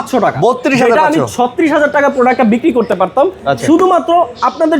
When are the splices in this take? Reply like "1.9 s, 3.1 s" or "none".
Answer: none